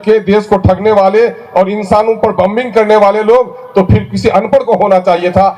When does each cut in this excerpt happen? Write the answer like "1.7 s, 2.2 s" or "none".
none